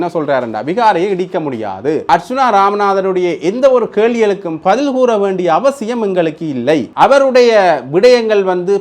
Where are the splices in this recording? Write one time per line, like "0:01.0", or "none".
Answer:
0:02.1
0:06.9